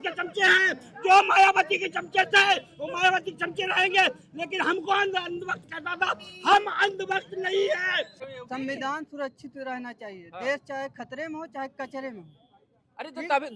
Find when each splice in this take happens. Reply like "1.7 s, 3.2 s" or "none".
8.2 s